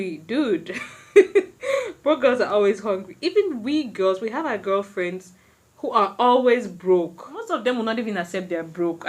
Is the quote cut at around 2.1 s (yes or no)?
no